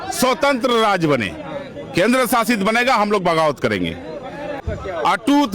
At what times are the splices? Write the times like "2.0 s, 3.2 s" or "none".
4.6 s